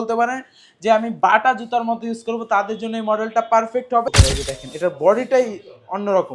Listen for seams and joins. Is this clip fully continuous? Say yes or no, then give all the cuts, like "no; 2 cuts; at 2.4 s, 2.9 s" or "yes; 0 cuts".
no; 1 cut; at 4.1 s